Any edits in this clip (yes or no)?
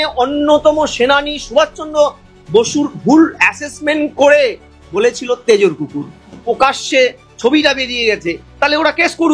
yes